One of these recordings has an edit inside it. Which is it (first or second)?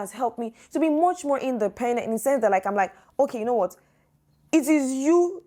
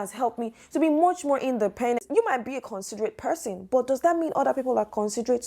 second